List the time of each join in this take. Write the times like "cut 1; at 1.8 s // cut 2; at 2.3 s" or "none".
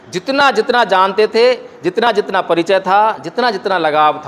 none